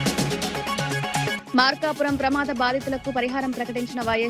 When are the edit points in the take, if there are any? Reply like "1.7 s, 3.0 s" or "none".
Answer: 1.3 s